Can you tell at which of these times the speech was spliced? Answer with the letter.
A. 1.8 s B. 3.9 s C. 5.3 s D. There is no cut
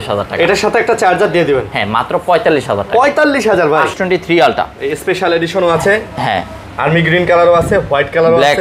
B